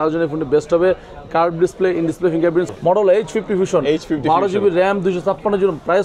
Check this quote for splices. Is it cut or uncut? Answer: cut